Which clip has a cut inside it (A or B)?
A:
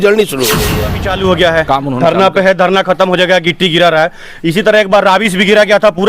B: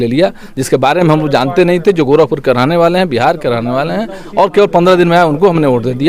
A